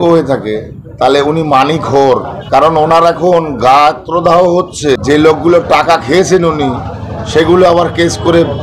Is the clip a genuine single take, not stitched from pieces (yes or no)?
no